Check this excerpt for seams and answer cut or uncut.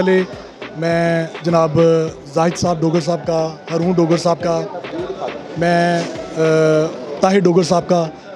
uncut